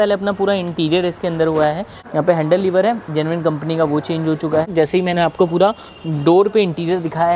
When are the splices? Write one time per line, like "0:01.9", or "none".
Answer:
0:02.0
0:04.7